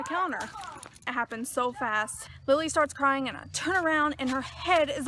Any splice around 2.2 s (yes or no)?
yes